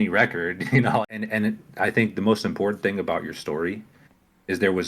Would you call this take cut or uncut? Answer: cut